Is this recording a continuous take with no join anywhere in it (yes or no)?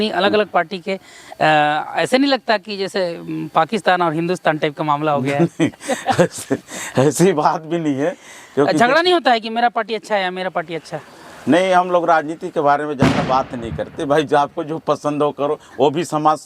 yes